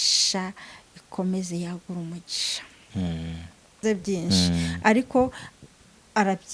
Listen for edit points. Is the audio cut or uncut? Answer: cut